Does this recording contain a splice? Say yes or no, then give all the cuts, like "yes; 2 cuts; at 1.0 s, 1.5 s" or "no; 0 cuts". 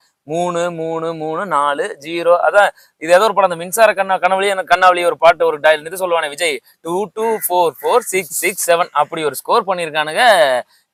no; 0 cuts